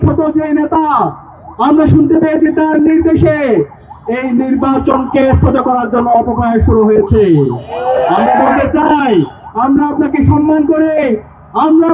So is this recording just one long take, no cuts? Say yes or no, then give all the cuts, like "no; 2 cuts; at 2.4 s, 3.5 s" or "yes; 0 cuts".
yes; 0 cuts